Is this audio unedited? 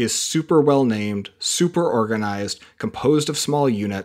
yes; 0 cuts

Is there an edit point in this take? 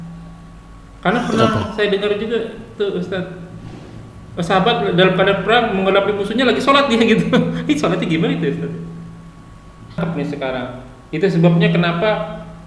yes; 1 cut; at 10.0 s

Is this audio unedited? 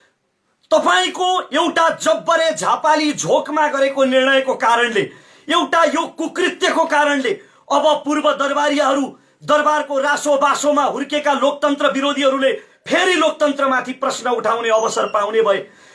yes; 0 cuts

